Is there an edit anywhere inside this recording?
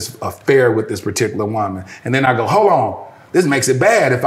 no; 0 cuts

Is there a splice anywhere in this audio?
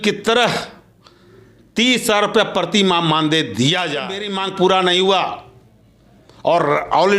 yes; 1 cut; at 4.3 s

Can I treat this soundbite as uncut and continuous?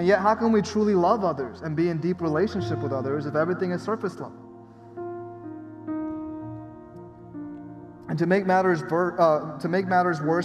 yes; 0 cuts

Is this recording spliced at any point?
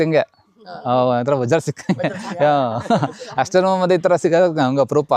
no; 0 cuts

